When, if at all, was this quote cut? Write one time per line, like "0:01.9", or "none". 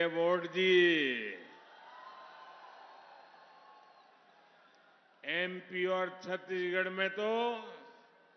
none